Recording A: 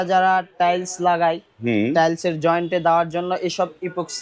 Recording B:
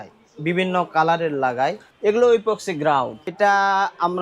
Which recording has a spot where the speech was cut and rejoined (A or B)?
B